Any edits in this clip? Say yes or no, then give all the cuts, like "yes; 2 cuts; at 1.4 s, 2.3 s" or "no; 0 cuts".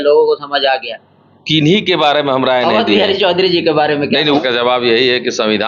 yes; 1 cut; at 4.4 s